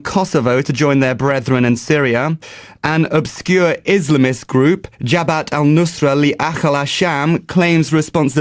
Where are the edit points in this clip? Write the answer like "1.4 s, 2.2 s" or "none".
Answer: 7.0 s